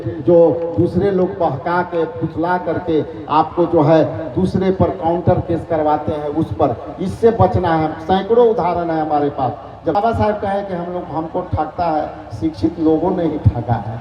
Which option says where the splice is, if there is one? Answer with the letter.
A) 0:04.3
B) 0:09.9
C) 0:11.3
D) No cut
B